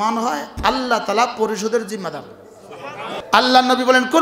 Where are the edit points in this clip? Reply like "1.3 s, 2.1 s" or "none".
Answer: 3.1 s